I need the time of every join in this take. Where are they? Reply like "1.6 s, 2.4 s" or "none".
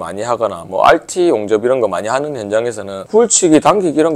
2.9 s